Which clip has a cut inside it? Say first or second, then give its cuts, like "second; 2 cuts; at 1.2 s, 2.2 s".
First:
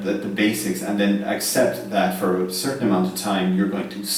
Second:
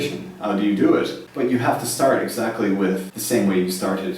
second; 2 cuts; at 1.2 s, 3.1 s